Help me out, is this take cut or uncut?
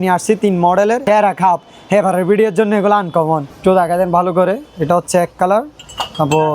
cut